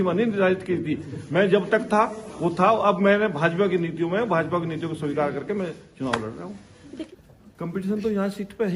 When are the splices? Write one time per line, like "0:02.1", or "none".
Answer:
0:07.1